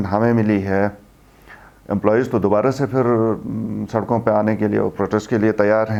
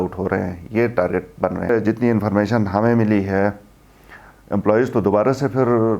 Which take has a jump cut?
second; 1 cut; at 1.7 s

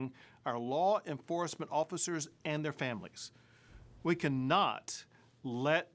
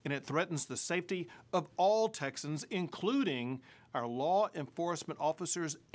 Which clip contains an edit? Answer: first; 1 cut; at 3.5 s

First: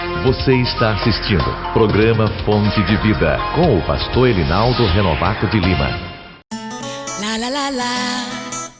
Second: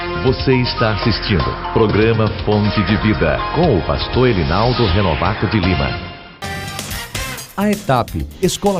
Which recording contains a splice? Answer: first; 1 cut; at 6.3 s

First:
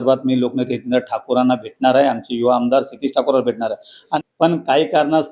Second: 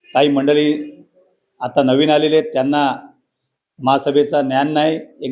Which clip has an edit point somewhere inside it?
first; 1 cut; at 4.1 s

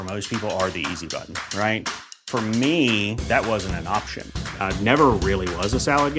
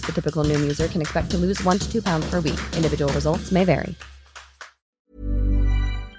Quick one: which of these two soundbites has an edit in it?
second; 1 cut; at 4.8 s

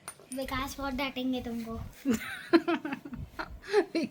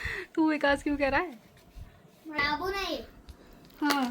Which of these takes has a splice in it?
second; 1 cut; at 2.4 s

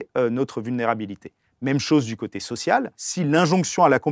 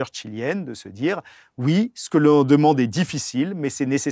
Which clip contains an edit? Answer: first; 1 cut; at 3.0 s

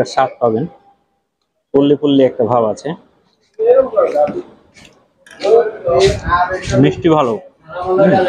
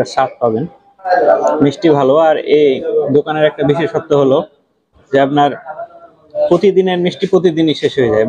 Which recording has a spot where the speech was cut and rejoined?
second; 1 cut; at 1.1 s

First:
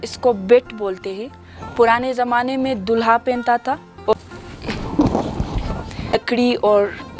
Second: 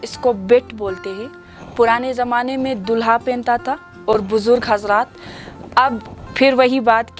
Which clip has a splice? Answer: first; 2 cuts; at 4.1 s, 6.2 s

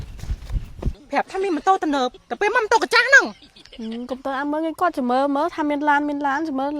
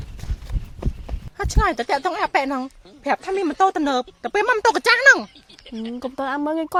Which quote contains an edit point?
first; 1 cut; at 0.9 s

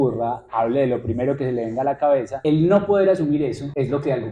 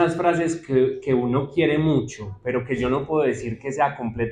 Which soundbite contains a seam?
first; 2 cuts; at 2.4 s, 3.4 s

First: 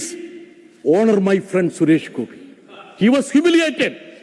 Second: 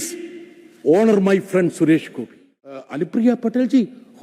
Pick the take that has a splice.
second; 1 cut; at 2.9 s

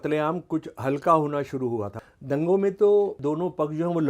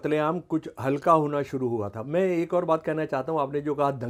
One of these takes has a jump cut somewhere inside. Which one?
first; 2 cuts; at 2.0 s, 3.2 s

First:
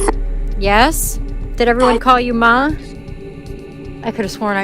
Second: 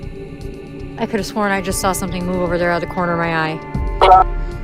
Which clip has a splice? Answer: first; 1 cut; at 1.4 s

